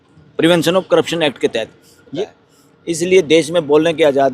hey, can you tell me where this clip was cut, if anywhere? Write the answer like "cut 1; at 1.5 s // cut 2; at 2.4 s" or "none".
cut 1; at 2.1 s